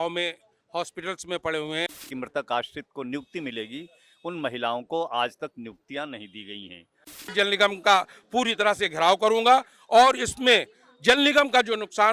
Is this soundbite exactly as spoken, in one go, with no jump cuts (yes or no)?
no